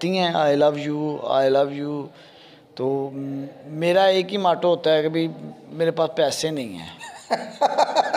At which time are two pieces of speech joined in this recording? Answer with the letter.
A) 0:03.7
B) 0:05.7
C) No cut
C